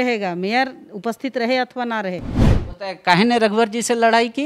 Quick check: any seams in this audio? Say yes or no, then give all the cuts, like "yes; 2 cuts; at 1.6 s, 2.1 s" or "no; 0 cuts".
yes; 1 cut; at 2.4 s